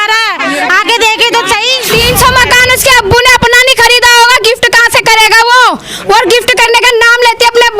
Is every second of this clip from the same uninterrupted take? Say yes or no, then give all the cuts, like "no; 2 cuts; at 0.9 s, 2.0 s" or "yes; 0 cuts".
no; 1 cut; at 1.8 s